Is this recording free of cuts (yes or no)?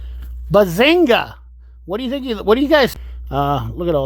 no